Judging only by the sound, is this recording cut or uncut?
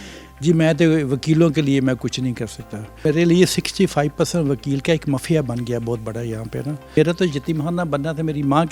cut